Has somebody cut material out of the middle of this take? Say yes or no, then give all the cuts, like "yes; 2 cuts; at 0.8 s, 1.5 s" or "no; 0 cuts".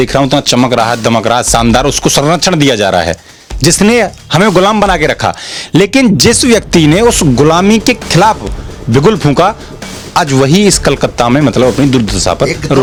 no; 0 cuts